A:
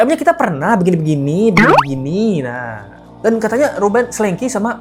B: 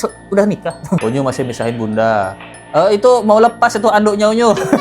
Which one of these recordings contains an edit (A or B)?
B